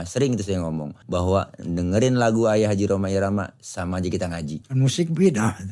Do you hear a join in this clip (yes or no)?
yes